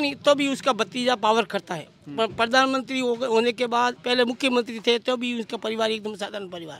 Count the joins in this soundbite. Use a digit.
0